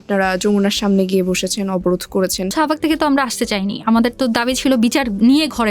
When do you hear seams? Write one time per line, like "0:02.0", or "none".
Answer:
0:02.5